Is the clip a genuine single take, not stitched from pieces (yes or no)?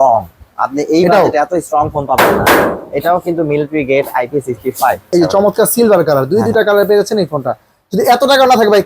no